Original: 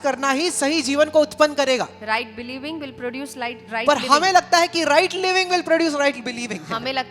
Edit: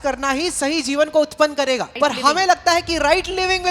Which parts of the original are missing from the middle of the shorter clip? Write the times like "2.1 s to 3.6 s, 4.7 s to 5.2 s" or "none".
1.9 s to 3.8 s